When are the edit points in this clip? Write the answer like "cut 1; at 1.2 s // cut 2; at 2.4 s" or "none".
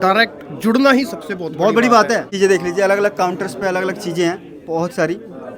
cut 1; at 2.3 s